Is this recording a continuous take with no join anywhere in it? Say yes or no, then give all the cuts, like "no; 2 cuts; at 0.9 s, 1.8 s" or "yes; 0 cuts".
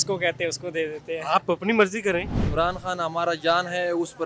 no; 1 cut; at 2.4 s